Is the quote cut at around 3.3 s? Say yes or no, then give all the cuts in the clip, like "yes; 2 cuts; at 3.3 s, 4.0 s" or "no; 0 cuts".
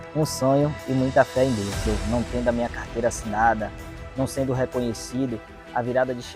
no; 1 cut; at 1.8 s